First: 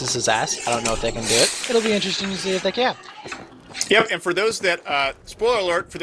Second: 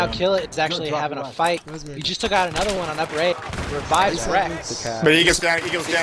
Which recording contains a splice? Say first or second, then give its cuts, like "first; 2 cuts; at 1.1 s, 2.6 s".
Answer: first; 1 cut; at 4.2 s